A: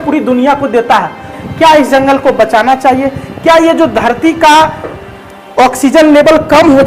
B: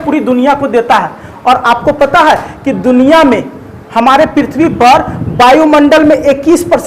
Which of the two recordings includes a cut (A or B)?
A